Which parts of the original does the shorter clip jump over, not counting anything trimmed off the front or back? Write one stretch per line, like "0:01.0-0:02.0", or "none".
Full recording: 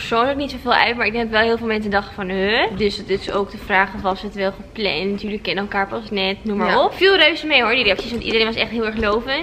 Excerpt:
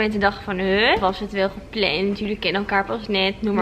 0:02.7-0:04.0